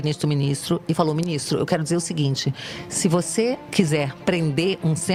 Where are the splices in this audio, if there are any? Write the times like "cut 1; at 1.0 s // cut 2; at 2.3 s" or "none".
none